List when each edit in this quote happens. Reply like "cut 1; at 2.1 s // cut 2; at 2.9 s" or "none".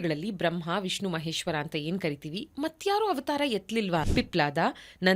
cut 1; at 4.1 s